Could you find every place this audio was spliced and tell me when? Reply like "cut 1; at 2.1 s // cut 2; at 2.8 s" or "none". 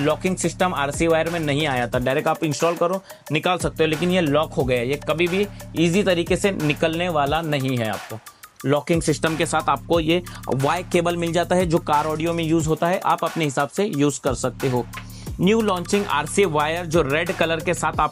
none